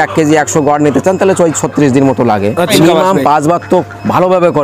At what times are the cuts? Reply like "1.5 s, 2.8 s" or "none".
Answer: 2.7 s